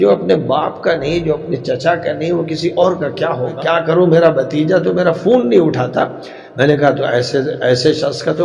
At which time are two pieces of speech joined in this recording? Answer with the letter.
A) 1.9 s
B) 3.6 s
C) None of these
B